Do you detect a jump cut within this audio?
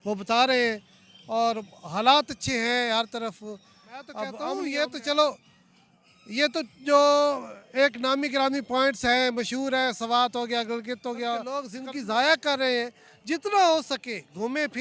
yes; 2 cuts; at 4.6 s, 11.7 s

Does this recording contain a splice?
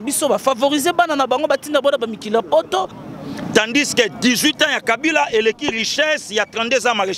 yes; 1 cut; at 3.0 s

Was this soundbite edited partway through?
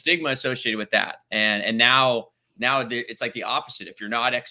no; 0 cuts

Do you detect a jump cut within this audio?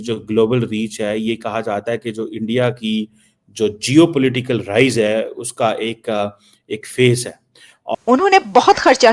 yes; 1 cut; at 7.9 s

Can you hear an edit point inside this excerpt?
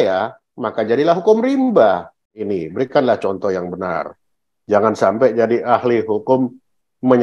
yes; 1 cut; at 2.4 s

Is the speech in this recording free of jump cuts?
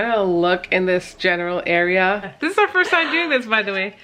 no; 1 cut; at 2.3 s

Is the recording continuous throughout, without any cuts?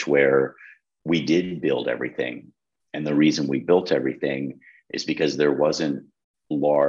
yes; 0 cuts

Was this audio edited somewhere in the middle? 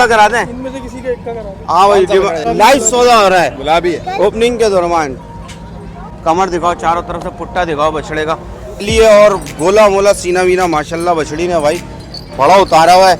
yes; 3 cuts; at 2.4 s, 6.0 s, 8.8 s

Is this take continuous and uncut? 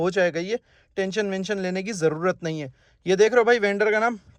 yes; 0 cuts

